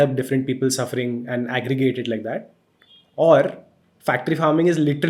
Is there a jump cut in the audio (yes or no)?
no